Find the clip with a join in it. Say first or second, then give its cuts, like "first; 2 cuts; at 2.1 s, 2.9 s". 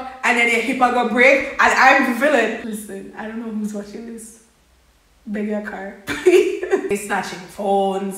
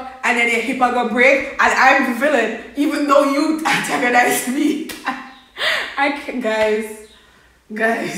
first; 2 cuts; at 2.6 s, 6.9 s